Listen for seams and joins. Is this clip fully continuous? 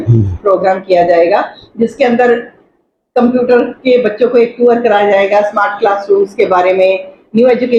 yes; 0 cuts

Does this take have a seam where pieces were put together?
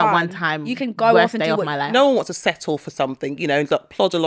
yes; 1 cut; at 1.9 s

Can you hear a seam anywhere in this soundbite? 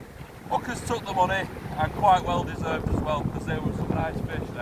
no; 0 cuts

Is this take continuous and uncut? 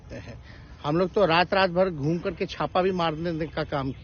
yes; 0 cuts

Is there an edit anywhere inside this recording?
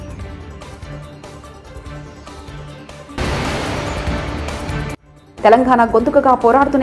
yes; 2 cuts; at 3.2 s, 5.1 s

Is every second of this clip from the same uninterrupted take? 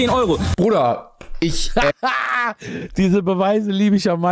yes; 0 cuts

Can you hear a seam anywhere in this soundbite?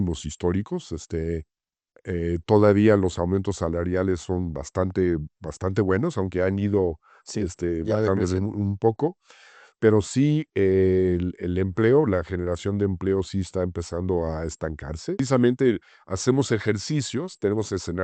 yes; 1 cut; at 15.2 s

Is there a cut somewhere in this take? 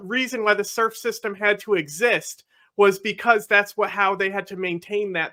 no; 0 cuts

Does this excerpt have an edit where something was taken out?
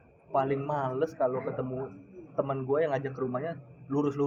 no; 0 cuts

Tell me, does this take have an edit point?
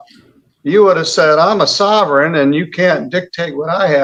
no; 0 cuts

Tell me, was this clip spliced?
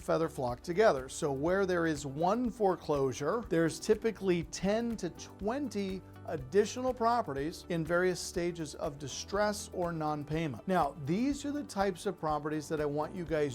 yes; 3 cuts; at 3.4 s, 7.6 s, 10.6 s

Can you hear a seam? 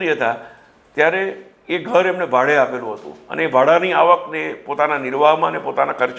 no; 0 cuts

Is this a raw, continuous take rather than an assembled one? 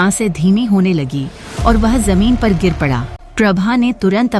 no; 1 cut; at 3.1 s

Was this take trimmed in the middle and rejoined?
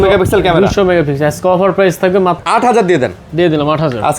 yes; 1 cut; at 2.4 s

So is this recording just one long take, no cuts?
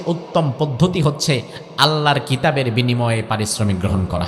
yes; 0 cuts

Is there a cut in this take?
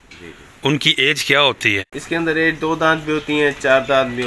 yes; 1 cut; at 1.9 s

